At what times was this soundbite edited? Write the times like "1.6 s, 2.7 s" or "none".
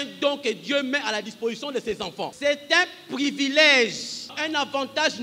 2.2 s, 4.3 s